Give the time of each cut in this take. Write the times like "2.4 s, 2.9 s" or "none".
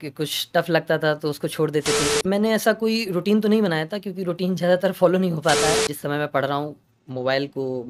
2.2 s, 5.9 s